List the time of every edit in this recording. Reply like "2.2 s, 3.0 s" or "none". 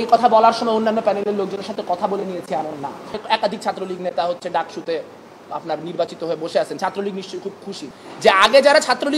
3.2 s, 7.9 s